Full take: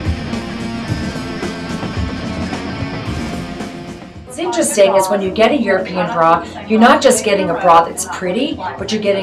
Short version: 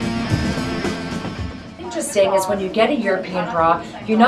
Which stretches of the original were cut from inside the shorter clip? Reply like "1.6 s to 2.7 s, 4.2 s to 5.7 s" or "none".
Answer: 2.1 s to 4.1 s